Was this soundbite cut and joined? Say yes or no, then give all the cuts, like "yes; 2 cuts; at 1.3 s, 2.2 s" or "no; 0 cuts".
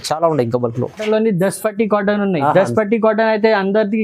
yes; 1 cut; at 1.0 s